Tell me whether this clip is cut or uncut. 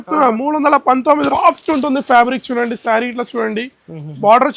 cut